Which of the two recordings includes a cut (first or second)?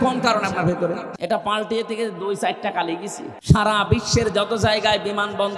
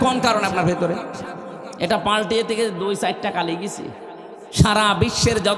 first